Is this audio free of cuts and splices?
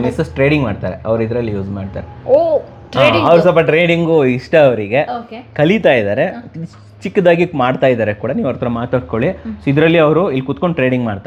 yes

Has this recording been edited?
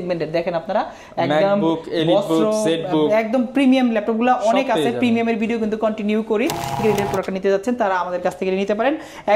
yes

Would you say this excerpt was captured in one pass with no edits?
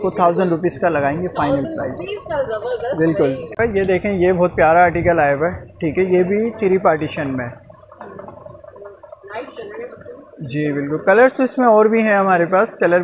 no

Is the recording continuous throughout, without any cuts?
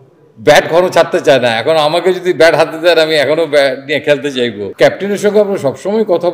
no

